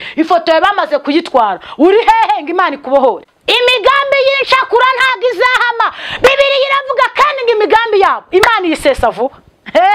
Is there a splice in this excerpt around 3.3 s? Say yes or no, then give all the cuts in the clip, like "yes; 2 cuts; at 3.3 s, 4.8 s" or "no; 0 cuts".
yes; 1 cut; at 3.3 s